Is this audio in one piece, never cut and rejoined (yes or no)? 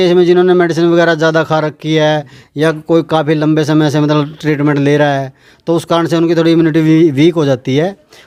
yes